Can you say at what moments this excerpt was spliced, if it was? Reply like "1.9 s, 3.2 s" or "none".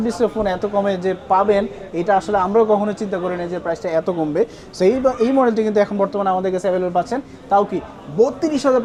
none